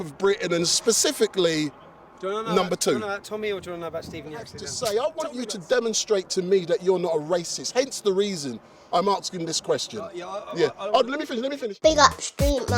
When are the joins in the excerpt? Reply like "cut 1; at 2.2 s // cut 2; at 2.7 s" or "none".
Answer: cut 1; at 4.6 s // cut 2; at 11.6 s